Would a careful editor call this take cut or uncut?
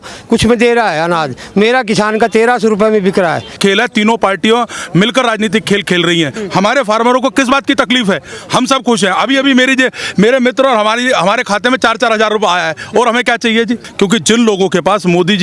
cut